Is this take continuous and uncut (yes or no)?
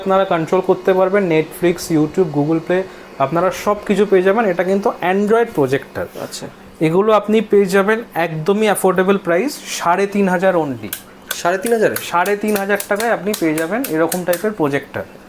yes